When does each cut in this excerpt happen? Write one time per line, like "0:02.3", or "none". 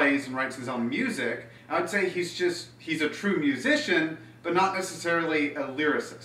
0:03.4